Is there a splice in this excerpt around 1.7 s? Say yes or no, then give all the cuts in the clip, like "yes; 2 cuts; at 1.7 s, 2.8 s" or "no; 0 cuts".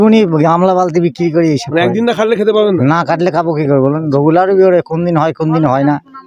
no; 0 cuts